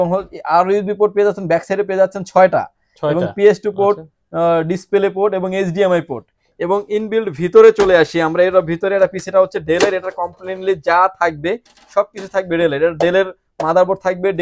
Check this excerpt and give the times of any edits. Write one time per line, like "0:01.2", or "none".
none